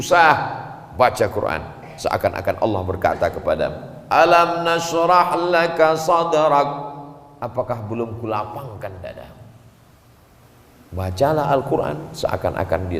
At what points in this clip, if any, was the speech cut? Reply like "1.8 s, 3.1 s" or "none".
10.4 s